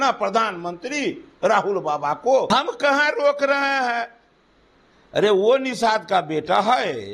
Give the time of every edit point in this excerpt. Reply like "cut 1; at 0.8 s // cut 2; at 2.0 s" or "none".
cut 1; at 2.5 s